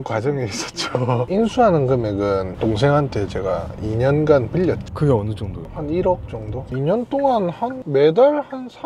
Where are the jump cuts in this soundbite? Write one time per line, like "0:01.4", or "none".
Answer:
0:04.9
0:06.7